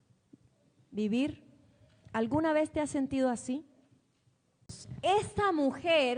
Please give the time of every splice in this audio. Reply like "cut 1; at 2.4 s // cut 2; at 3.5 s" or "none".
cut 1; at 5.0 s